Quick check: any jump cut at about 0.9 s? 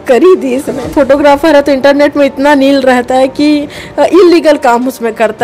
yes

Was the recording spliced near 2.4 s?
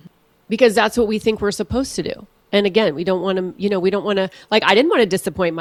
no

